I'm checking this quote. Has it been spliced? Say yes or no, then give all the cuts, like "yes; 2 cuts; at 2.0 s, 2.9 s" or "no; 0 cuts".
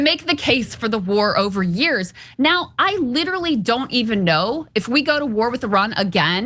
no; 0 cuts